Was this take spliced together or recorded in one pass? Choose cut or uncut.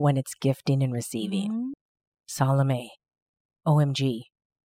cut